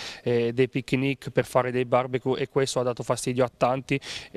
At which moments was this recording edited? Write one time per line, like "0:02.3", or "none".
none

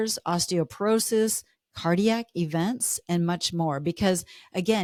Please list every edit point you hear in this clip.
none

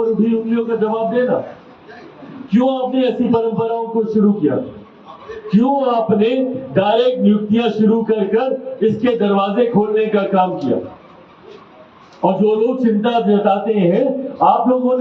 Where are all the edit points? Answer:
none

